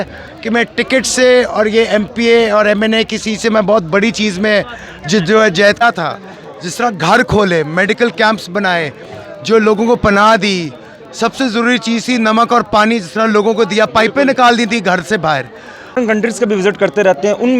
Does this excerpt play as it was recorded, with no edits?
no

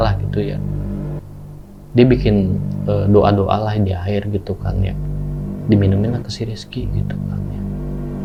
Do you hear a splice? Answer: no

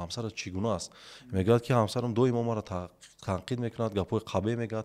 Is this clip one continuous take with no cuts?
yes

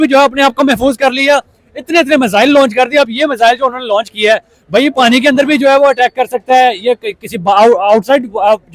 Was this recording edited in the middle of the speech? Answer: no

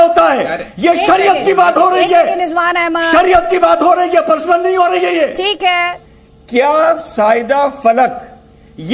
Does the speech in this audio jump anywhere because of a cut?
yes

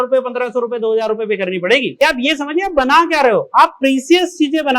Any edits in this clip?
yes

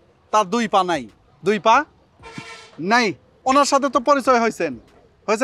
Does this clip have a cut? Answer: no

